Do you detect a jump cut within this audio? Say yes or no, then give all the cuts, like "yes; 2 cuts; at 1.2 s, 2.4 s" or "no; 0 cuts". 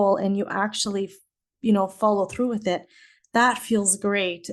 no; 0 cuts